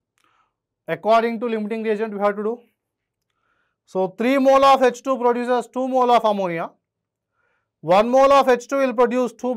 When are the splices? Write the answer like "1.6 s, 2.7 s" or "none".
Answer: none